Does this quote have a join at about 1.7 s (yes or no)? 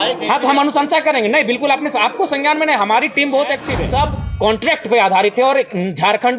no